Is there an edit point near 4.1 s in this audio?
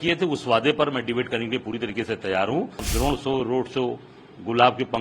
no; 1 cut; at 2.9 s

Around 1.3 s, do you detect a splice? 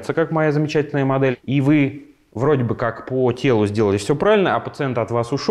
yes; 1 cut; at 1.3 s

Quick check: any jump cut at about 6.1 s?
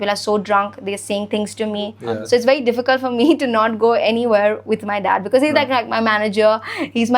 no; 1 cut; at 2.0 s

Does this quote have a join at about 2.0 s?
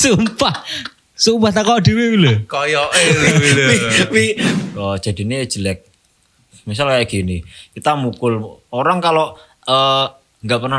no; 1 cut; at 4.5 s

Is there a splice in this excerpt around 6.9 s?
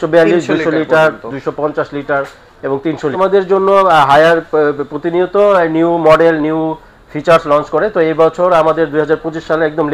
no; 1 cut; at 3.1 s

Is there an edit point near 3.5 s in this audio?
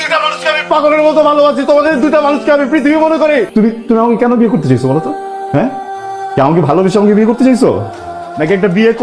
yes; 1 cut; at 3.5 s

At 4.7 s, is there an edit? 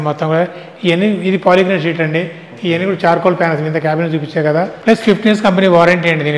yes; 1 cut; at 4.7 s

